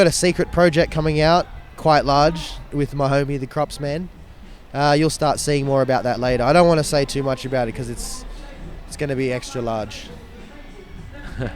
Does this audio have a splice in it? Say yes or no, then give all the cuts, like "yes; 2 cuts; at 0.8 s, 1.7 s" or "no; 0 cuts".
no; 0 cuts